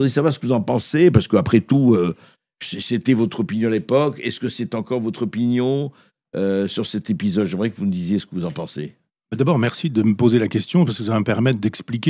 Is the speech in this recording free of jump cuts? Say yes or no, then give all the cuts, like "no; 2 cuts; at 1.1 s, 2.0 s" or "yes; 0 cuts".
yes; 0 cuts